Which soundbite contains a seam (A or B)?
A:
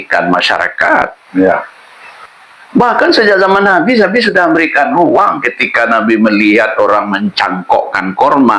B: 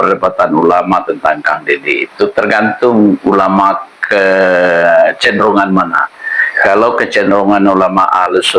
A